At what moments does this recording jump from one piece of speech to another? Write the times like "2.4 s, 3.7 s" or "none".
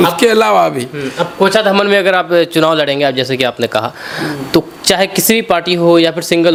none